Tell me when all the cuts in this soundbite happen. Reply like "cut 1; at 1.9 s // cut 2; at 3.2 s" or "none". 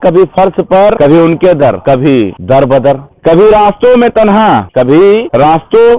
cut 1; at 1.0 s // cut 2; at 2.6 s // cut 3; at 4.9 s